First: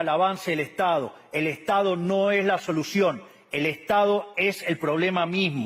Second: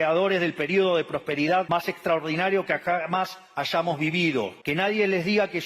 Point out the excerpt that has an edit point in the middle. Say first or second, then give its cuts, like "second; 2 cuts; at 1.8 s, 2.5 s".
second; 2 cuts; at 1.7 s, 4.6 s